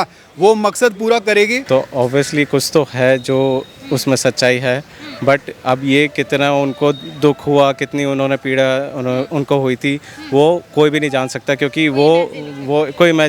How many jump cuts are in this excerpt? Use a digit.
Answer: 1